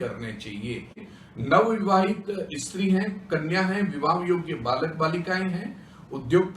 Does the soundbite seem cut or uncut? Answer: cut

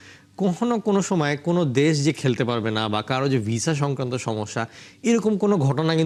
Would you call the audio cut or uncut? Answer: uncut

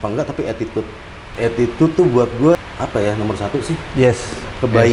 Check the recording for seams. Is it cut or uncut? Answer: cut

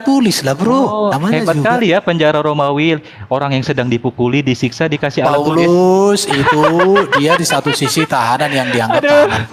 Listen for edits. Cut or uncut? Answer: uncut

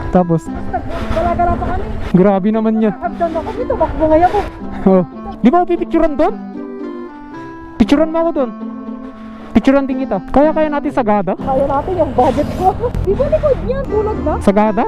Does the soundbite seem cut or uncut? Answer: cut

